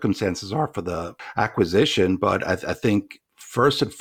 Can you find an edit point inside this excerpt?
yes; 1 cut; at 1.2 s

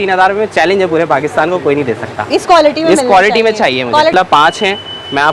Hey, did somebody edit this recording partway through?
yes; 1 cut; at 4.1 s

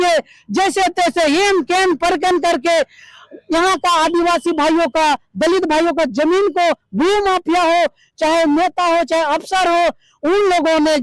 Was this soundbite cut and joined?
no; 0 cuts

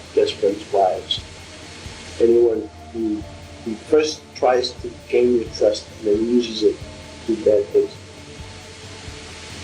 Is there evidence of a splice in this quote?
no; 0 cuts

